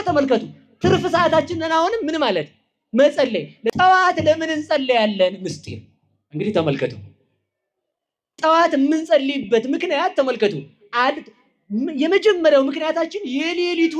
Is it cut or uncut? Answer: cut